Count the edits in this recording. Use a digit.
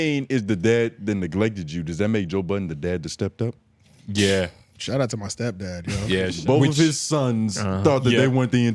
1